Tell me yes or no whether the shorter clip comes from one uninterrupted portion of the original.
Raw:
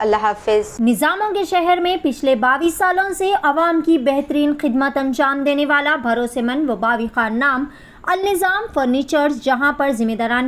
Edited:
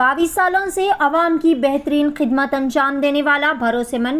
yes